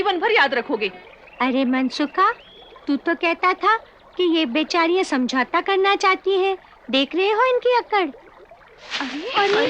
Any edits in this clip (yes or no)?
no